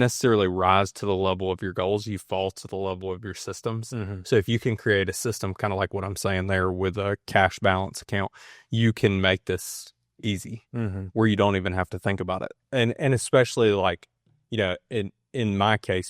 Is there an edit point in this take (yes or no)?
no